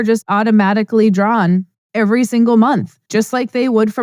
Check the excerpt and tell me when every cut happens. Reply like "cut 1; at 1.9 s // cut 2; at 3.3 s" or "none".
cut 1; at 1.8 s // cut 2; at 3.0 s